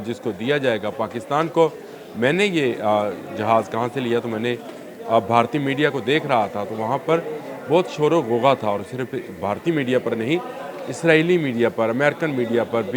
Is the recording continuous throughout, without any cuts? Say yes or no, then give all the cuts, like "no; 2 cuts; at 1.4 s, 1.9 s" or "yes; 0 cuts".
yes; 0 cuts